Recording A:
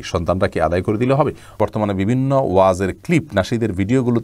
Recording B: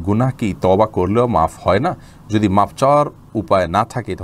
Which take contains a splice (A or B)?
A